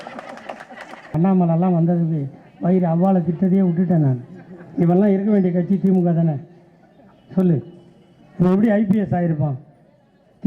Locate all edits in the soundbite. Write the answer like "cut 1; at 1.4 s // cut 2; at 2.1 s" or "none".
cut 1; at 1.1 s